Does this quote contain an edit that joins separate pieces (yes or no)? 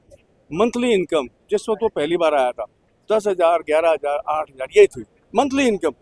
no